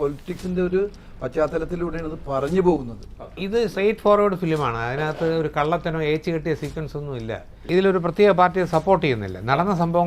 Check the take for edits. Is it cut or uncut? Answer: cut